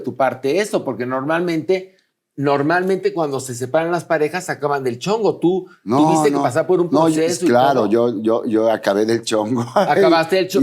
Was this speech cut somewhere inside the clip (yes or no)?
no